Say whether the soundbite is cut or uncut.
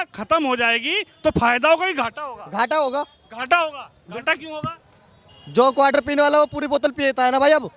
uncut